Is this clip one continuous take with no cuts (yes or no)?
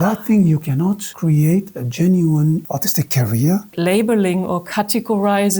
no